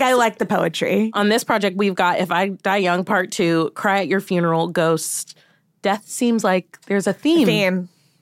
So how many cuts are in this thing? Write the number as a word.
one